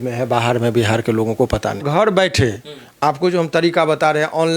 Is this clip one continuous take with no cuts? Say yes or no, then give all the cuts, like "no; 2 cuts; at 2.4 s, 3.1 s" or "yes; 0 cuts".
no; 1 cut; at 1.8 s